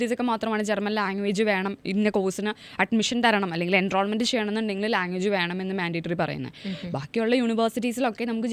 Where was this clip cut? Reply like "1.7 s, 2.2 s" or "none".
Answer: none